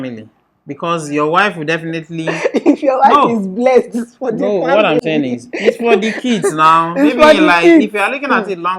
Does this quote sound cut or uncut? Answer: uncut